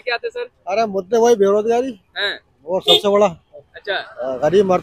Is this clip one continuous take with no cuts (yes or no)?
yes